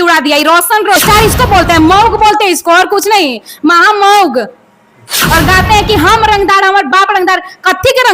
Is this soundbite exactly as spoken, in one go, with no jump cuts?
no; 2 cuts; at 1.0 s, 5.2 s

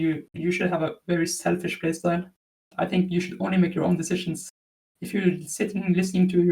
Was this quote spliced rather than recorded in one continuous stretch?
yes; 1 cut; at 2.6 s

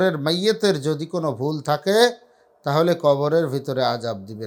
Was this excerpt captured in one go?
yes; 0 cuts

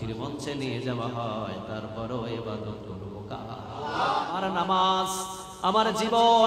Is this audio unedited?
no; 1 cut; at 4.3 s

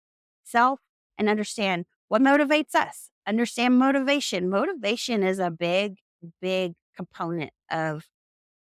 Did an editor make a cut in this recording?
no; 0 cuts

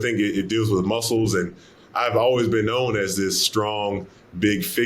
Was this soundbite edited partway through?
yes; 1 cut; at 1.7 s

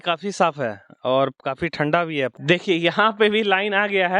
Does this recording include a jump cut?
yes; 1 cut; at 2.4 s

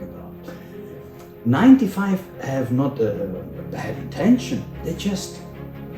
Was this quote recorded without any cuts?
no; 1 cut; at 4.8 s

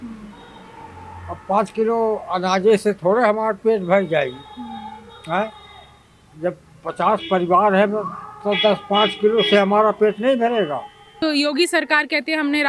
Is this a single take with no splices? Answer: no; 1 cut; at 11.0 s

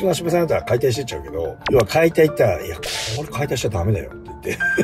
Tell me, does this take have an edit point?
yes; 1 cut; at 1.6 s

